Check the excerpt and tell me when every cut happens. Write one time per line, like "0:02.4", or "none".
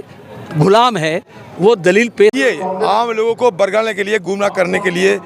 0:02.3